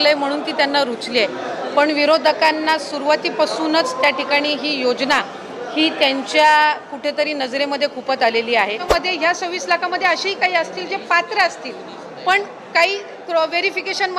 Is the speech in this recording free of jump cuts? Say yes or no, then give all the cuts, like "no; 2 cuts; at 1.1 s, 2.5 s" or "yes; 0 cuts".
no; 1 cut; at 8.8 s